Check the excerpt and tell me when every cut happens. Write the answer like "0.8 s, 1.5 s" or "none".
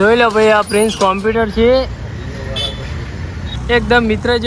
3.5 s